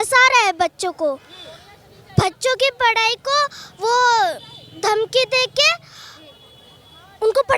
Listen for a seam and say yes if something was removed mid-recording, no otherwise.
no